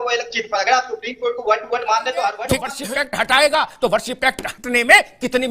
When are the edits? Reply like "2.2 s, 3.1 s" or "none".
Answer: 2.7 s